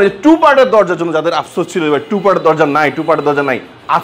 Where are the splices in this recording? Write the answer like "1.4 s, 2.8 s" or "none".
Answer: none